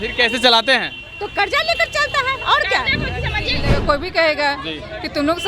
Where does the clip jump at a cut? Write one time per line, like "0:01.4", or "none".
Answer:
0:03.6